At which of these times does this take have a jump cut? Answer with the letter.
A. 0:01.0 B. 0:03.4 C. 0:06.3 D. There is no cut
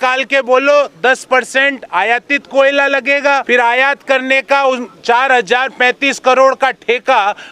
B